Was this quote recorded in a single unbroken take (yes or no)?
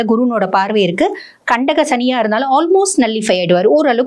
yes